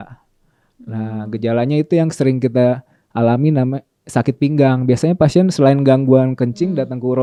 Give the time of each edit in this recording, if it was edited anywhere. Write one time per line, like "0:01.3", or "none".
none